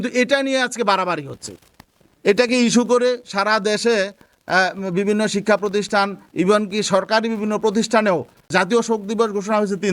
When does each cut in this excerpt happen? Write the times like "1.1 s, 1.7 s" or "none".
8.4 s